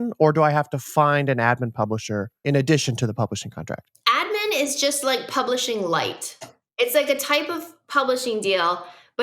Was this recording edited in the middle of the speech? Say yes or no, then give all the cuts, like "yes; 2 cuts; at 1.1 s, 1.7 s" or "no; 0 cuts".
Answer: yes; 3 cuts; at 2.3 s, 3.9 s, 6.7 s